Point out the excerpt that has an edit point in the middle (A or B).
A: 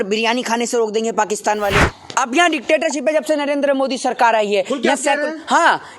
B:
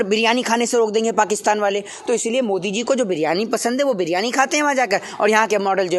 A